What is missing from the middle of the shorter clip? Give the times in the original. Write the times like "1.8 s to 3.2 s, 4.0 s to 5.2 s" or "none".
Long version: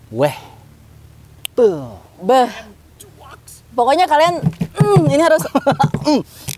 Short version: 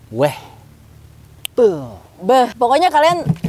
2.5 s to 3.7 s